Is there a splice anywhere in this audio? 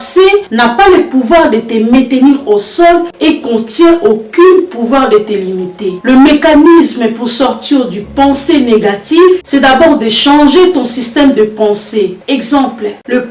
no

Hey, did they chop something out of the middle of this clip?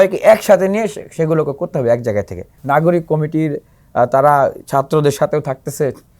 yes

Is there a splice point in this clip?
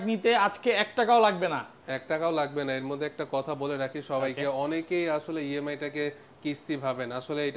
no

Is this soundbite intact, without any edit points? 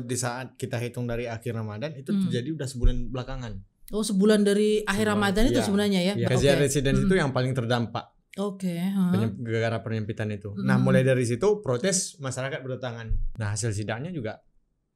no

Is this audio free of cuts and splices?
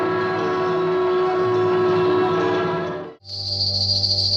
no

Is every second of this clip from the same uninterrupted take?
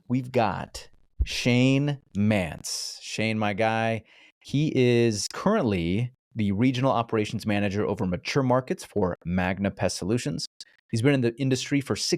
yes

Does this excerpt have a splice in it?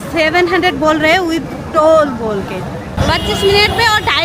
yes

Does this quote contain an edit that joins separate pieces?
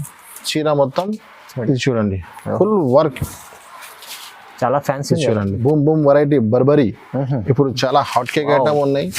yes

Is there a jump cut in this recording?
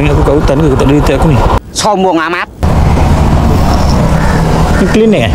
yes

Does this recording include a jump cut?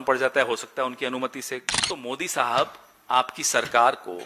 yes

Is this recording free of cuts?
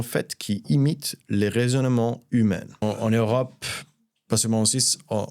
no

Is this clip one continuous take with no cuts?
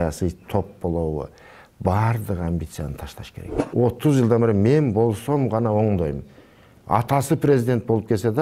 no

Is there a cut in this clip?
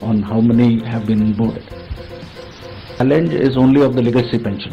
yes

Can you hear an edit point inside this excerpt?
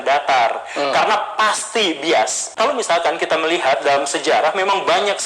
no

